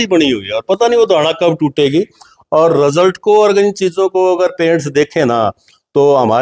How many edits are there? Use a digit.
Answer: 0